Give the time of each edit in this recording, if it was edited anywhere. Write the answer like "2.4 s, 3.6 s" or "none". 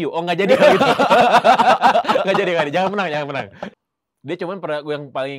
3.6 s